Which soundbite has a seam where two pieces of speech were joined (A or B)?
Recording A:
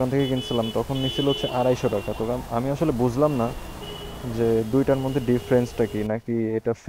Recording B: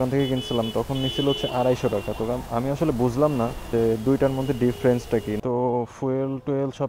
B